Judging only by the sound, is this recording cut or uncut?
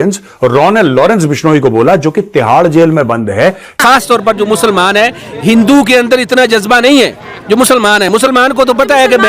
cut